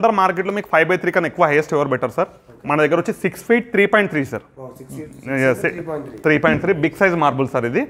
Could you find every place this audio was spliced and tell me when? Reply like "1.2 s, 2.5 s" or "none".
none